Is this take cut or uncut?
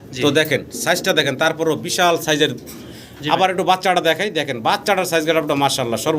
cut